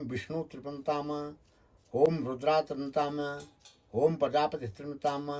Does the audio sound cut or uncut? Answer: uncut